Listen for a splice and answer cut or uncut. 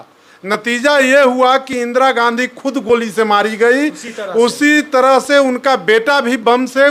uncut